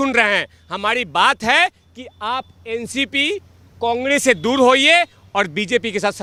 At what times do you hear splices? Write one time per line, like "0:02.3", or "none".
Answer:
none